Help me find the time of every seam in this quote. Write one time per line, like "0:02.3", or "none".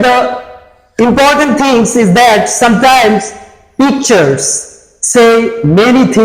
none

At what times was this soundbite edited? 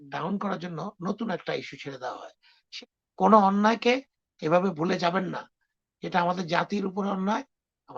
0:02.7

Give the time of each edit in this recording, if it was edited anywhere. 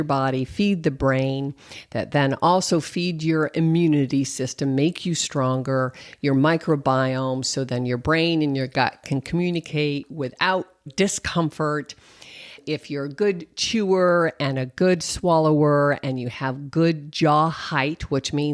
none

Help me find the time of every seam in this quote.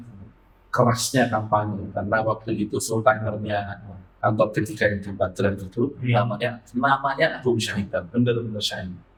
none

